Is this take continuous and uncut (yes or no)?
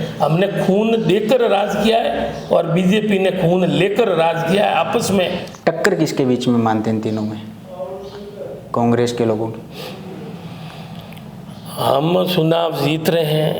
no